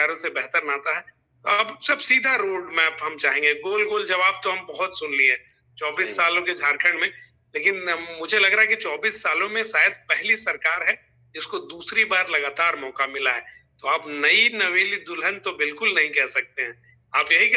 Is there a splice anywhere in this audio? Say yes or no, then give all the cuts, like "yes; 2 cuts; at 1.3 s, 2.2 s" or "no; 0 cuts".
no; 0 cuts